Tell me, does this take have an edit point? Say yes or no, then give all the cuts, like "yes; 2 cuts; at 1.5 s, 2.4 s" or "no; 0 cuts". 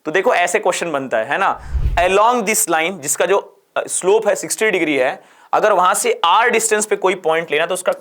yes; 1 cut; at 1.7 s